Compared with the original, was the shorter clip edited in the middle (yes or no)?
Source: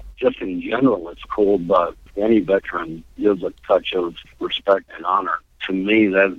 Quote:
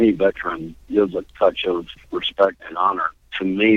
no